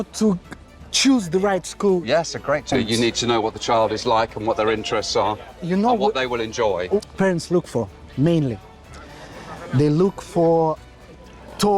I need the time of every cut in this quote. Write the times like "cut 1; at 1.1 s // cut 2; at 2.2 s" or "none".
cut 1; at 2.7 s // cut 2; at 7.1 s